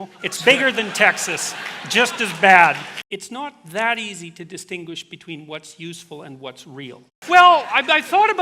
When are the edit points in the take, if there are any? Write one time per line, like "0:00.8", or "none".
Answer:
0:02.9
0:07.1